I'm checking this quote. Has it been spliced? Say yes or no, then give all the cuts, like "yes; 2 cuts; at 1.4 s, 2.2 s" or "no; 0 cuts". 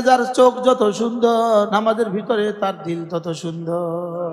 yes; 1 cut; at 1.7 s